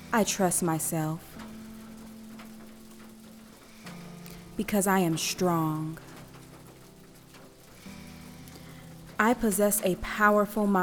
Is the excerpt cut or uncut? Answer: cut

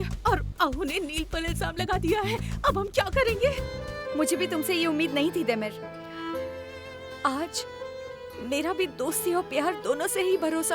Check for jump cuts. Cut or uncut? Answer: cut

